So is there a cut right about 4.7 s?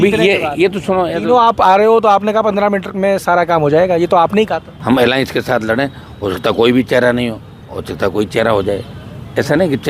yes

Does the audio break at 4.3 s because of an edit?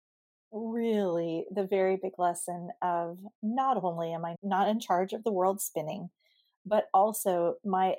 yes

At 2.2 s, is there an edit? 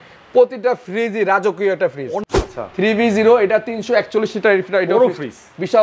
yes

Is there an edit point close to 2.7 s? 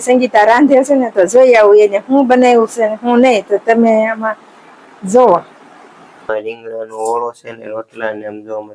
no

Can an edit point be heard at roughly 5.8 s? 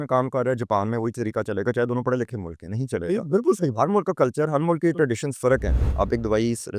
yes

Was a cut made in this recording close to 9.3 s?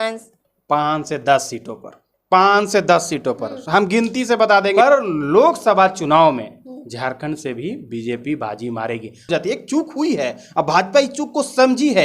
yes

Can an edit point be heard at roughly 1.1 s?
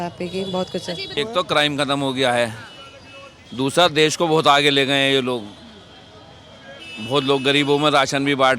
yes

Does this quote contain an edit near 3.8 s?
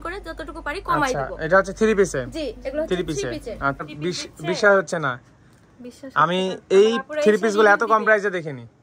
yes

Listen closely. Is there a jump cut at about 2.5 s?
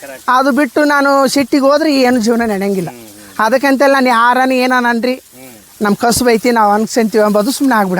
no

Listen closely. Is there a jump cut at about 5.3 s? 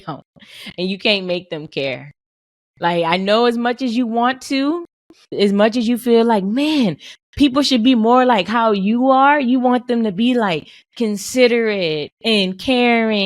yes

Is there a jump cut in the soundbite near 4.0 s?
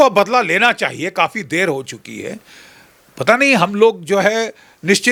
no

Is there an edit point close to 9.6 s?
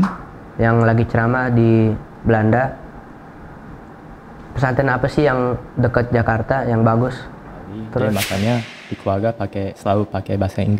no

